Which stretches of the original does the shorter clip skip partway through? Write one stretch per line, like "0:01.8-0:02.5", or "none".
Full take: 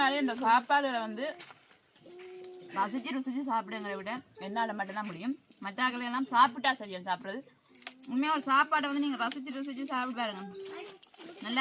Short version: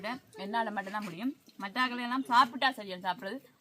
none

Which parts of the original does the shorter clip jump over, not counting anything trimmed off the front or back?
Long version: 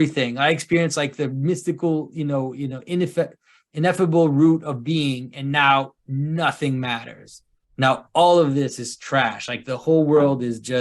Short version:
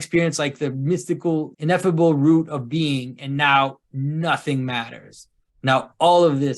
0:02.1-0:03.7

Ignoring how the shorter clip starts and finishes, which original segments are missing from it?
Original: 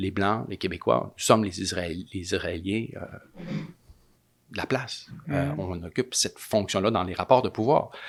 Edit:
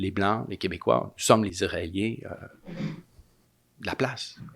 0:01.5-0:02.2

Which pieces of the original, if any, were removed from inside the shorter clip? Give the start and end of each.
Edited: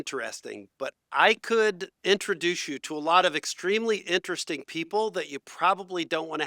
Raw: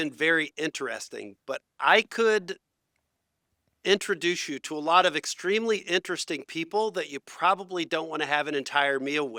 0:02.6-0:03.7

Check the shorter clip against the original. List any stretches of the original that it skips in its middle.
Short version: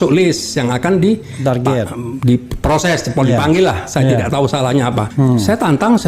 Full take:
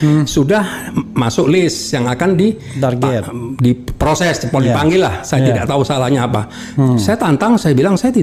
0:06.4-0:06.7

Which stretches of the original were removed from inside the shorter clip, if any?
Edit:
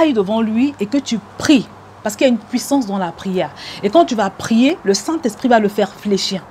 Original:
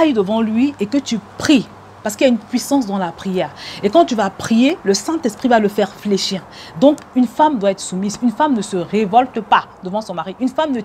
none

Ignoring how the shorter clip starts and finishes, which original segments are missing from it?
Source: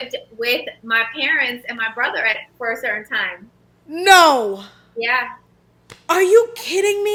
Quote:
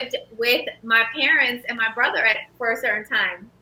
none

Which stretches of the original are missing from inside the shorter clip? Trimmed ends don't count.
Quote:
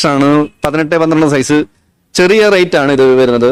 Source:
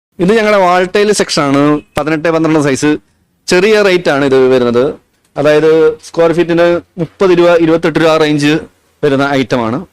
none

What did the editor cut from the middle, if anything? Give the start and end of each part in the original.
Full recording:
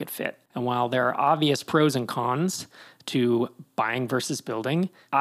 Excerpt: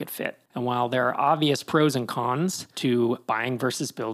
0:02.7-0:03.0
0:03.5-0:03.7

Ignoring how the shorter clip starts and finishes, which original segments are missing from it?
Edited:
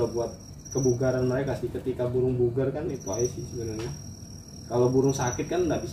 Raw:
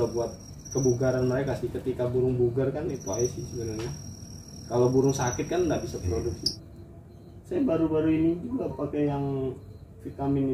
none

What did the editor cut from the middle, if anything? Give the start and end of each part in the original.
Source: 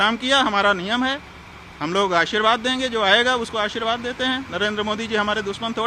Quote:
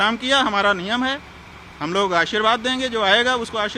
none

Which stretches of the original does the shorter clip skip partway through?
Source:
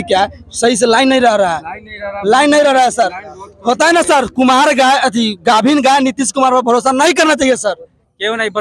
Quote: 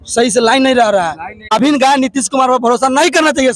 0:02.0-0:05.6

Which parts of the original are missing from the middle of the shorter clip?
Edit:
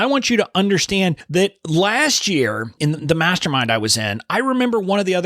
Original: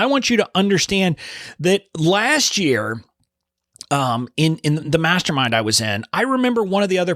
0:01.2-0:01.5
0:03.1-0:04.6

